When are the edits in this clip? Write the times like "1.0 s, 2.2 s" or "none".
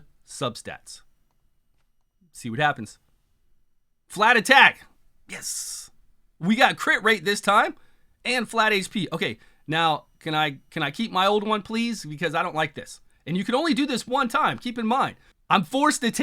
15.3 s